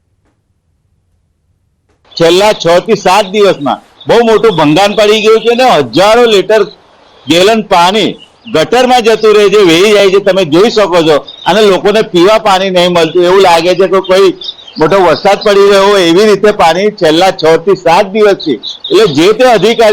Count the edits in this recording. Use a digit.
1